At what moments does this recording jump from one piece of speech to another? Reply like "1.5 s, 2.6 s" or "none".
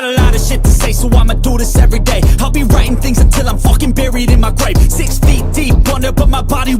none